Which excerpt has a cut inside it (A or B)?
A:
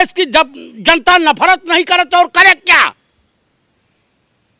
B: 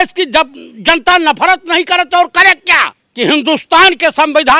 B